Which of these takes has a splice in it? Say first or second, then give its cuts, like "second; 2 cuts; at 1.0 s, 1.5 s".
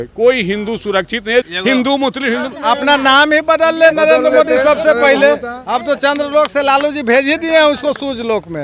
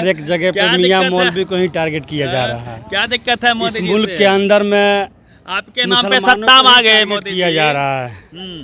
first; 3 cuts; at 1.5 s, 2.5 s, 5.6 s